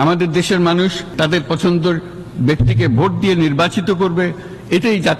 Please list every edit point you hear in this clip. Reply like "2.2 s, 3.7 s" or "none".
1.0 s